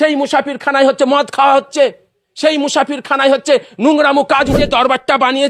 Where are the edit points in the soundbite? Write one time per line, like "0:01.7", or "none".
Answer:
0:04.5